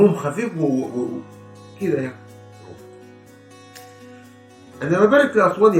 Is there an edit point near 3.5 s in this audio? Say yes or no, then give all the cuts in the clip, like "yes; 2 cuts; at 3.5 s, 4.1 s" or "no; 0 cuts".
no; 2 cuts; at 2.2 s, 4.8 s